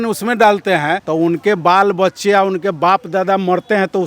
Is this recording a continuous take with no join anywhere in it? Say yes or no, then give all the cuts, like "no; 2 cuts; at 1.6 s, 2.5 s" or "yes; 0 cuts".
no; 1 cut; at 1.0 s